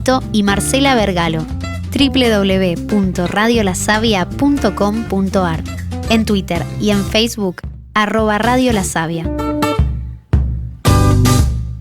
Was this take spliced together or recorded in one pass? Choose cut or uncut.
cut